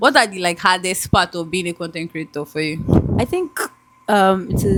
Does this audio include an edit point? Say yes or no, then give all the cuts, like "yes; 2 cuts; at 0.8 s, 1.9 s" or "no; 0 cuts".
no; 0 cuts